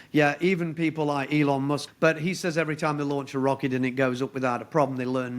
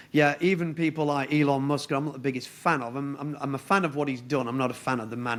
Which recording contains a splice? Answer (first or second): first